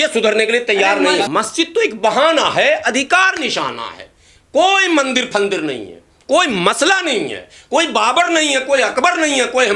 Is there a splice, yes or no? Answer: yes